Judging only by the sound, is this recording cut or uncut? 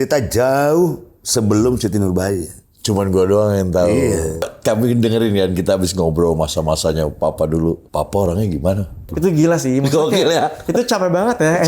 cut